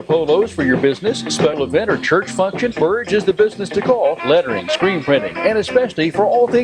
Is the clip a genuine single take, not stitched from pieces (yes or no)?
no